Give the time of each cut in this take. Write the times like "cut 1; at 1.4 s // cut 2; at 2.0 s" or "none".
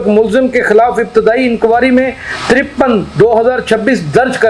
none